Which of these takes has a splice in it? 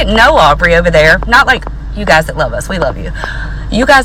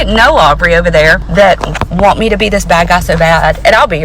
second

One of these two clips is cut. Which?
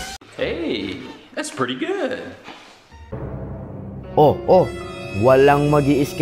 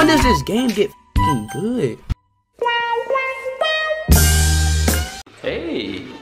first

